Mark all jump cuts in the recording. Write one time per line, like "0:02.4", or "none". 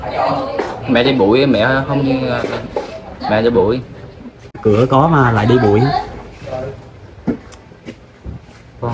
0:04.6